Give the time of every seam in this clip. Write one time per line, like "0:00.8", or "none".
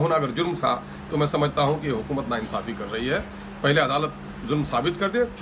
none